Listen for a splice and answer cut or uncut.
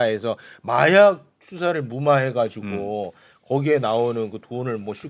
uncut